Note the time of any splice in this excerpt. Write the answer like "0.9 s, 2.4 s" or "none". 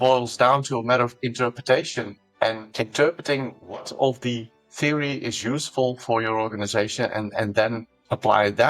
none